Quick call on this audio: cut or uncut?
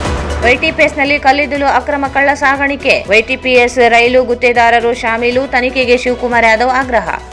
uncut